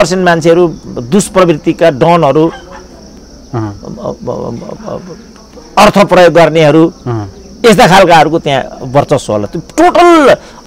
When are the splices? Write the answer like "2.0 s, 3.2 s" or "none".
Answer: none